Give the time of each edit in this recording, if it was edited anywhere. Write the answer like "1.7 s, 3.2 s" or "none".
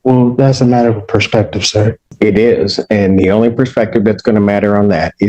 2.1 s